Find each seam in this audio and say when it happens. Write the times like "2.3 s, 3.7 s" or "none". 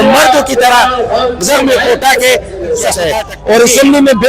3.0 s